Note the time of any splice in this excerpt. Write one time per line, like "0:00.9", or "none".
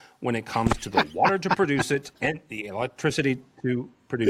0:02.1